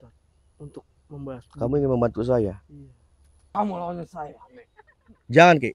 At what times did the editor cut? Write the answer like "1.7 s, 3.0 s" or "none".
3.4 s